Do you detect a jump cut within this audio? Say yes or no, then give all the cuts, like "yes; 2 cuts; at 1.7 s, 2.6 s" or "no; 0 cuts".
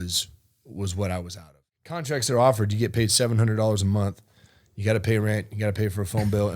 yes; 1 cut; at 2.1 s